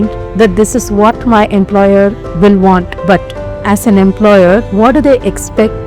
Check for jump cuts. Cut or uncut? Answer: cut